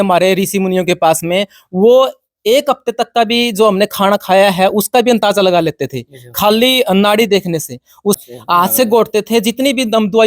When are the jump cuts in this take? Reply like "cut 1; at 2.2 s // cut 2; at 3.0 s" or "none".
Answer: cut 1; at 8.2 s